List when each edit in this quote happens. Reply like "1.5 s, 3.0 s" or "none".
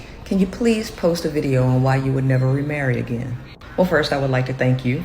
2.0 s, 3.9 s